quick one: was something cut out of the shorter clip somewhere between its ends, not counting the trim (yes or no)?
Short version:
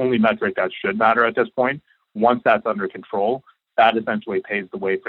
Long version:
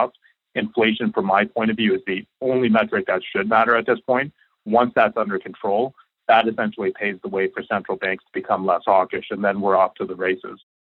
no